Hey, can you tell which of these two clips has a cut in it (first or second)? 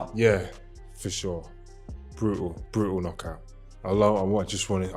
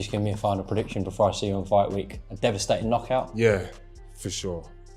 first